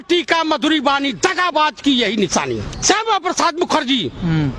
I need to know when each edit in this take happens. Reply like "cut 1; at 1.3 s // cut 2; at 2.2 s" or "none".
cut 1; at 2.7 s